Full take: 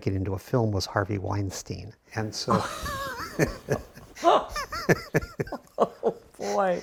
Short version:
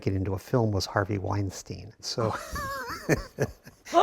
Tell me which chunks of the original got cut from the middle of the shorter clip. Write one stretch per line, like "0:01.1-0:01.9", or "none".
0:02.0-0:02.3

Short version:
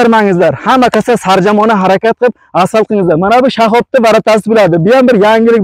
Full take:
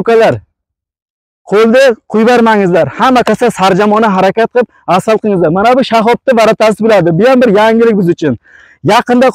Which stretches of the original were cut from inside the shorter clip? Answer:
none

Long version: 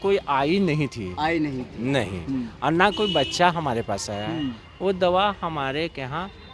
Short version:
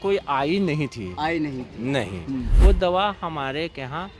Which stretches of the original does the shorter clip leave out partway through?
0:02.5-0:04.7

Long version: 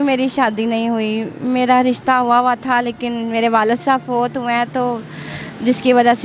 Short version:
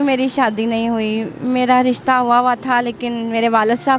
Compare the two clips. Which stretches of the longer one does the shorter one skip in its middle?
none

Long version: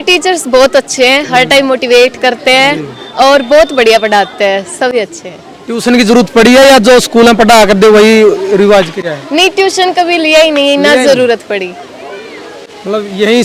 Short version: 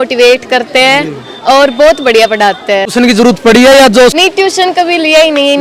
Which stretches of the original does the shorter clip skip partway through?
0:04.6-0:05.8
0:07.1-0:09.4

